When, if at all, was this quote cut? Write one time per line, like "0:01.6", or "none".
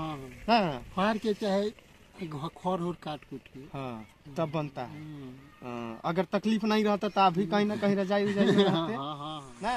none